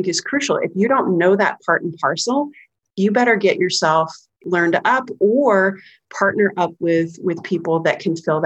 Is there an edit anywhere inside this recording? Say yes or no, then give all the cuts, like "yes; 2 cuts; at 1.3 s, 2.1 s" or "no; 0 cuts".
yes; 1 cut; at 4.4 s